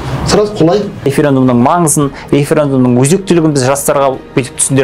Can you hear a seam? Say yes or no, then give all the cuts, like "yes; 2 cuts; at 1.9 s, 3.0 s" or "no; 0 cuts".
yes; 1 cut; at 1.1 s